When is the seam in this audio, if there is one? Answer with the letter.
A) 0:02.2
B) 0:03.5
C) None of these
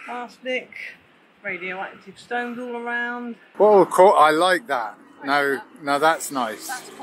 B